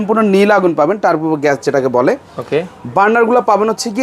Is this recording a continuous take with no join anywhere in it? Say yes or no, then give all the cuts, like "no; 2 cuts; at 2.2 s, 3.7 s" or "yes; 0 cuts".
yes; 0 cuts